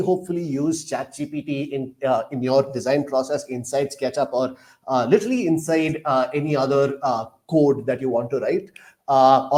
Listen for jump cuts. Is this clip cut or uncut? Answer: uncut